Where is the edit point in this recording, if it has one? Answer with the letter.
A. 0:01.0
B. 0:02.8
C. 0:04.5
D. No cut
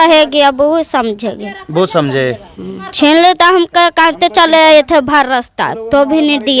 B